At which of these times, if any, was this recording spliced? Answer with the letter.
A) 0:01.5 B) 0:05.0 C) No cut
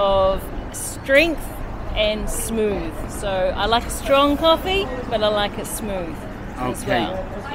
C